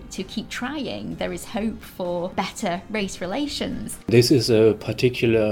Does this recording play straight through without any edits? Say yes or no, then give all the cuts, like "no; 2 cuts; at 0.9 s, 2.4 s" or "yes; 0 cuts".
no; 2 cuts; at 2.3 s, 3.9 s